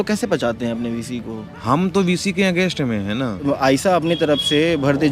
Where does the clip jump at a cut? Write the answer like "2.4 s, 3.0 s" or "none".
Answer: 1.5 s, 3.4 s